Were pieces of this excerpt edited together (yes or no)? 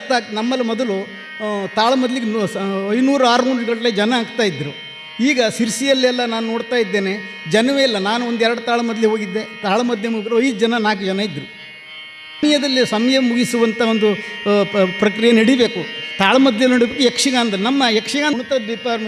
yes